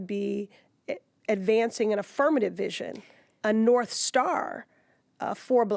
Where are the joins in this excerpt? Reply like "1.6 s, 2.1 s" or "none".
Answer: none